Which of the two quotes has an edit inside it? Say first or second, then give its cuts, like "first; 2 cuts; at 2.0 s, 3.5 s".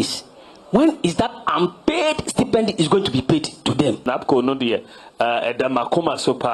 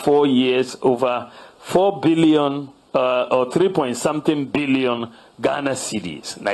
first; 1 cut; at 4.0 s